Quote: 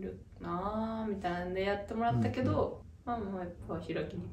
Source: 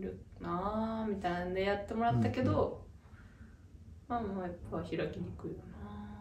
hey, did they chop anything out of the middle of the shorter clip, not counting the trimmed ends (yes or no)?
yes